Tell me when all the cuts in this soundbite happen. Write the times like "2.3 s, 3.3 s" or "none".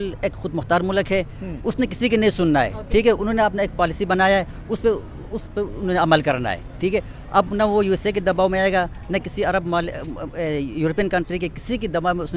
none